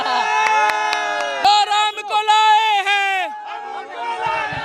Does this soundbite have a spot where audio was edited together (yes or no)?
yes